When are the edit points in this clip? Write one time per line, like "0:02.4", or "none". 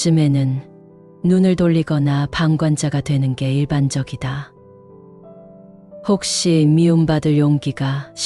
0:04.7
0:06.1

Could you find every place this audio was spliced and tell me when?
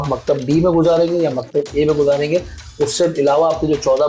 none

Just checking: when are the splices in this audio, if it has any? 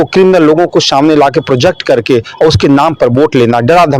none

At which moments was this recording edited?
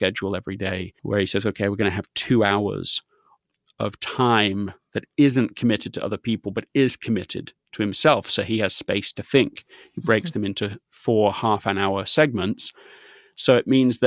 0:01.0

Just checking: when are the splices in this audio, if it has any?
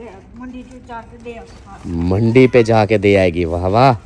none

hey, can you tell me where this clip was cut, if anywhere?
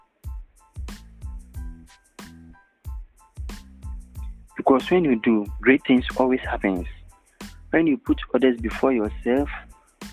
0:04.3

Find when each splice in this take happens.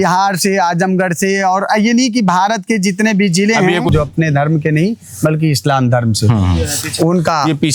0:03.9

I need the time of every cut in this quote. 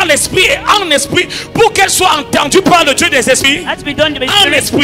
none

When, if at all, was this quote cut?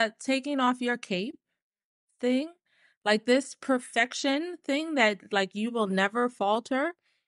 none

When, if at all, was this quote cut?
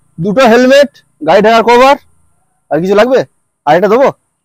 none

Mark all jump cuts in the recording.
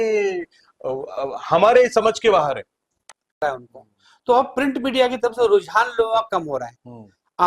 0:03.4

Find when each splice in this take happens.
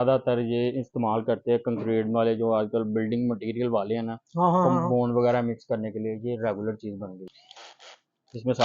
0:07.3

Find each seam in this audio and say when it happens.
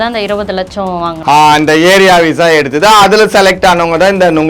none

